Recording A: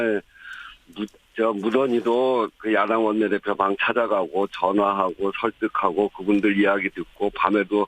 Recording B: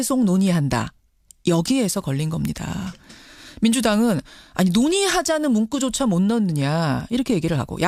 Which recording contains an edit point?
A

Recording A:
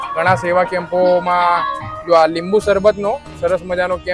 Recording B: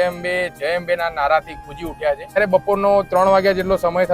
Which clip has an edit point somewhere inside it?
B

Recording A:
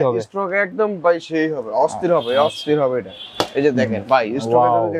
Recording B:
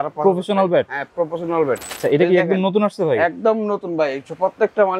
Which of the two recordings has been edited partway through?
B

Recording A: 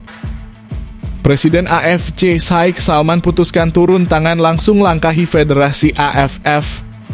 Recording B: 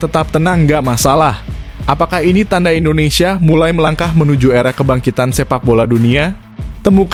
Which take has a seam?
A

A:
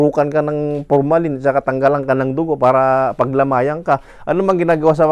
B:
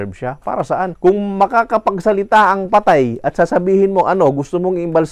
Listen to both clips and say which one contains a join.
B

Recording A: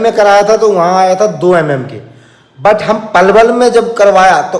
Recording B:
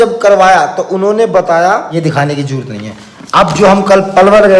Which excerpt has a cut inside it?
B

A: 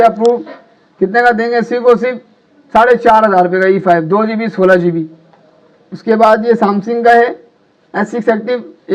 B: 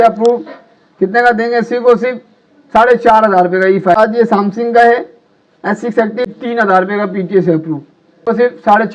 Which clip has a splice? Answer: B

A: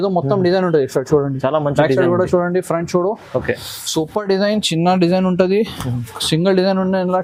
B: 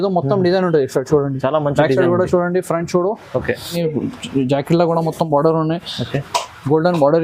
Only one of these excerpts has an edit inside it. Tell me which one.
B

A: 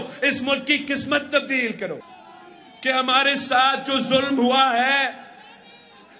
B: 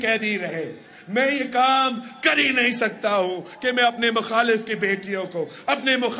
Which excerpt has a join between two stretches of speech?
A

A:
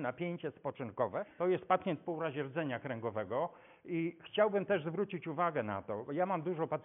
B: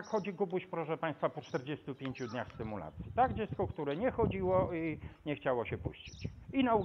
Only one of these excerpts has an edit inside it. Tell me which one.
A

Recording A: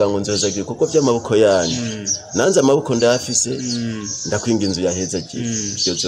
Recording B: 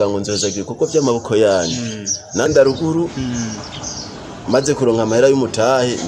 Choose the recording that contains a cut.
B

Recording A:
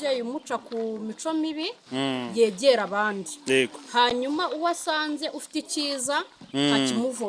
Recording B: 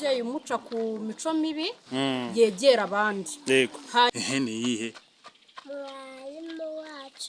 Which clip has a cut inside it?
B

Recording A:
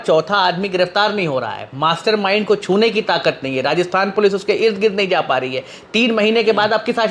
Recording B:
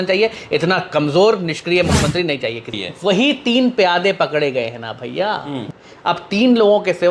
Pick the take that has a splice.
B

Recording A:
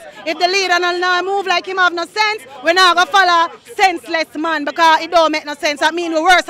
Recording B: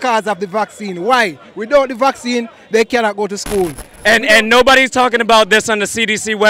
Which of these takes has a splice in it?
B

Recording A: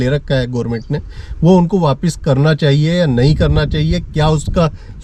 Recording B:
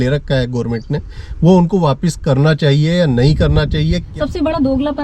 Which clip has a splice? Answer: B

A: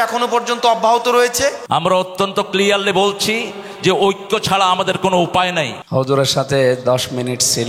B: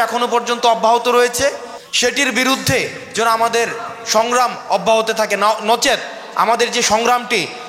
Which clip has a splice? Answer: A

